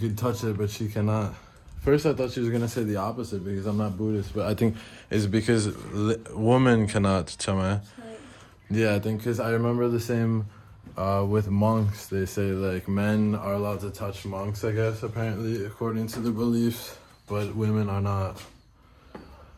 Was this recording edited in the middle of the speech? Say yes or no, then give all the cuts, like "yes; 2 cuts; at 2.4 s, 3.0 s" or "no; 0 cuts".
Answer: no; 0 cuts